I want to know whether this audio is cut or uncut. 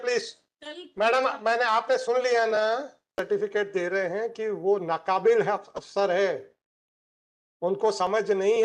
cut